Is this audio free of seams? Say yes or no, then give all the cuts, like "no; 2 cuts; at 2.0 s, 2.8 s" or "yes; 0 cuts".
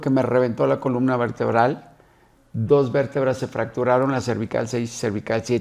yes; 0 cuts